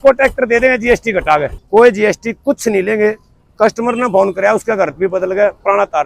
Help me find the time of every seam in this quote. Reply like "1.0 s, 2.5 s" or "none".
1.6 s